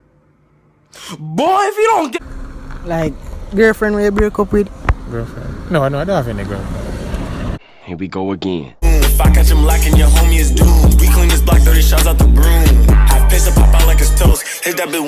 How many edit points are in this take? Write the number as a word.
one